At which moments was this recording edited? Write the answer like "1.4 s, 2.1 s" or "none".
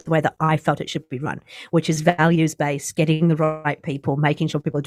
none